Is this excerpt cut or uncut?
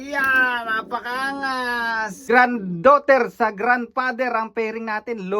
cut